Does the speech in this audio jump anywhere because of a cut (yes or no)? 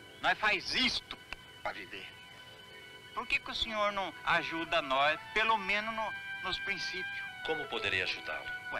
no